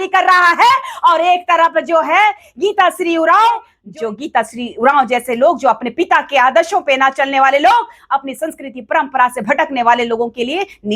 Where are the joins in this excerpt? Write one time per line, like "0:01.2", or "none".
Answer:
0:03.8